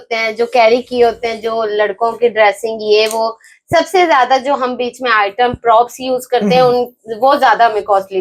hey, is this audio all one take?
yes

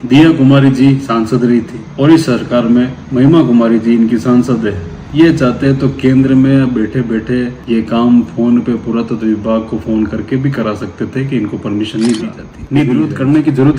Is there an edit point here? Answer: yes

